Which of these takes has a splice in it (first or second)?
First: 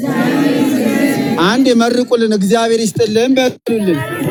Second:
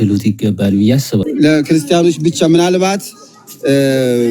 second